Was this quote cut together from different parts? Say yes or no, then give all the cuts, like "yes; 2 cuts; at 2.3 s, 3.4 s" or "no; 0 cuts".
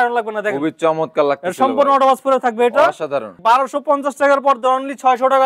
yes; 1 cut; at 3.3 s